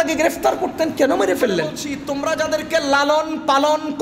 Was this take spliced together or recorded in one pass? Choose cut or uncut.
cut